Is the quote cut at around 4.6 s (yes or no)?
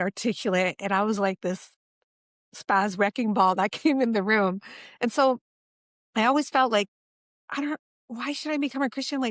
no